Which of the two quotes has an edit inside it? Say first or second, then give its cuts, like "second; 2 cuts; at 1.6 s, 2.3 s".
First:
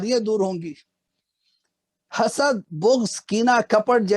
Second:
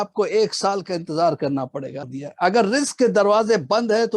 second; 1 cut; at 2.1 s